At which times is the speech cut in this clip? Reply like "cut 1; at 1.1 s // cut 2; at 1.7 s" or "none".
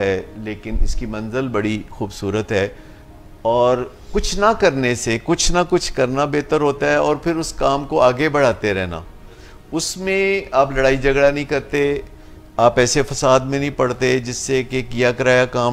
none